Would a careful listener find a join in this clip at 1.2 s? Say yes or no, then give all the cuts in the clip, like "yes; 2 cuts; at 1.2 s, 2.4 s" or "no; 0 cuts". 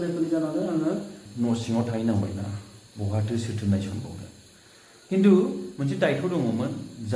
yes; 1 cut; at 1.2 s